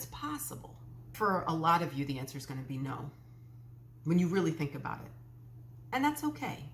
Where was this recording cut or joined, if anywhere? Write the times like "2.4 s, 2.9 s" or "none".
1.1 s